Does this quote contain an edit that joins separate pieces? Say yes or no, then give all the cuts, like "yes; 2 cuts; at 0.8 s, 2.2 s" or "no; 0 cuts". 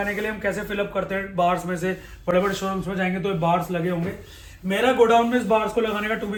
no; 0 cuts